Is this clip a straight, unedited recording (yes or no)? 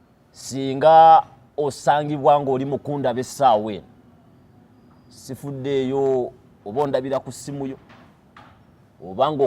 yes